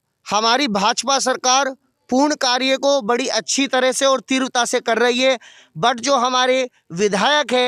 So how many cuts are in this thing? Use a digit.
0